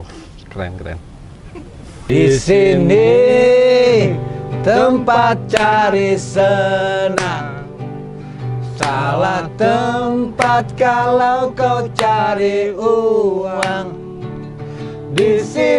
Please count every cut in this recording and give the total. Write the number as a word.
one